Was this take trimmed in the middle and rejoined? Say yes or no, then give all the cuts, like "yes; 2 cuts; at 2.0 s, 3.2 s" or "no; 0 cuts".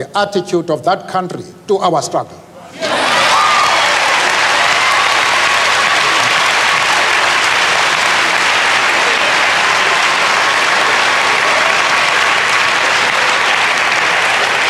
no; 0 cuts